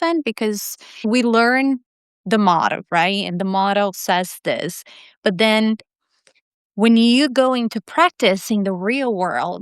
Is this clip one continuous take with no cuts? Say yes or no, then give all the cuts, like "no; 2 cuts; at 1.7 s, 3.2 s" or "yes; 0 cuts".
no; 1 cut; at 1.0 s